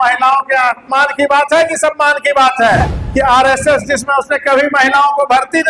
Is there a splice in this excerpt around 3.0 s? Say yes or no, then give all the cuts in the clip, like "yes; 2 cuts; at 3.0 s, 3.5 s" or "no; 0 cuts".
yes; 1 cut; at 3.0 s